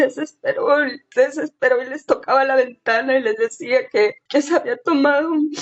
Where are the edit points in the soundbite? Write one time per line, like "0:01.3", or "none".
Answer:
none